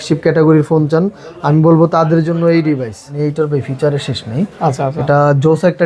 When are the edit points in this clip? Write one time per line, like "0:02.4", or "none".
0:03.1